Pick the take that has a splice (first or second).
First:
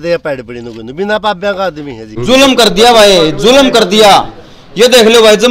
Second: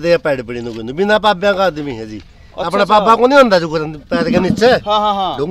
first